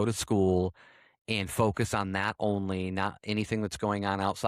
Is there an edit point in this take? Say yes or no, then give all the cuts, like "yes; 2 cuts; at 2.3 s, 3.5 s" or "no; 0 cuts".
no; 0 cuts